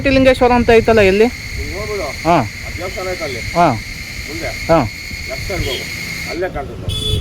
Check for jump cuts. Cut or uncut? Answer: uncut